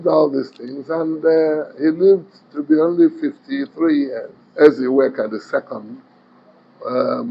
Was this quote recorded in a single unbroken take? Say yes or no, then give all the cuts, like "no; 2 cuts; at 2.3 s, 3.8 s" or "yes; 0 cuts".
no; 1 cut; at 4.4 s